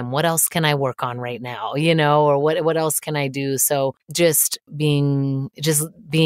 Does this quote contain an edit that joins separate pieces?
no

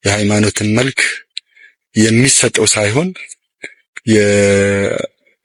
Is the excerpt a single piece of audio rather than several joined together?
yes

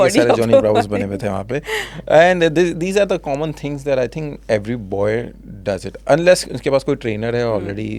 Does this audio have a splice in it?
no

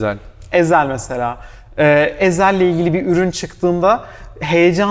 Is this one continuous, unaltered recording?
yes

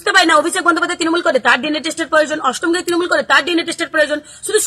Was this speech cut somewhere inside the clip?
no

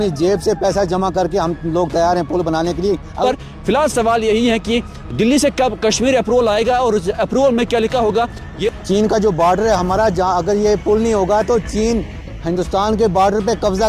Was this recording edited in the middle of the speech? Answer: yes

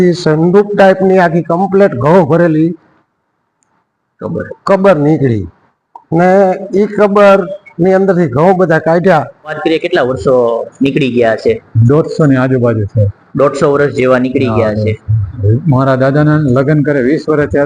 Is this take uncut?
no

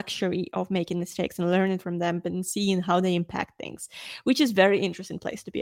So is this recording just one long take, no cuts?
yes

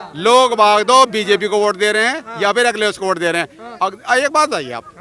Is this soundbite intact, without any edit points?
yes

